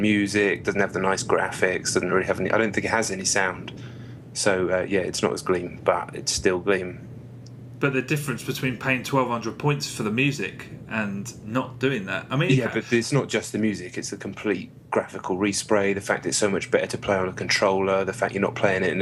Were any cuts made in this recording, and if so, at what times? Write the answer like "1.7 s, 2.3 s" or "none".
2.7 s